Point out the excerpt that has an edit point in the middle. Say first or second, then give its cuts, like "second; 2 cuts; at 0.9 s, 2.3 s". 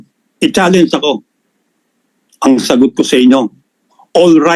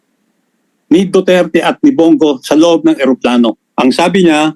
second; 1 cut; at 3.6 s